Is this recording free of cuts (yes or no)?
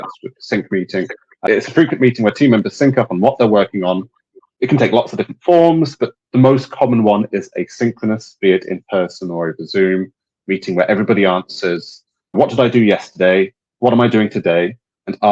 no